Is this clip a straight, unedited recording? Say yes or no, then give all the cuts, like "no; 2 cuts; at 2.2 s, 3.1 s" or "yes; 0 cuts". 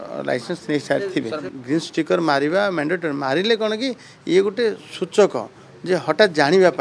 no; 1 cut; at 1.5 s